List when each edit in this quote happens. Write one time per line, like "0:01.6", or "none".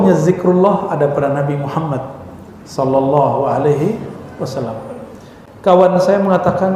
none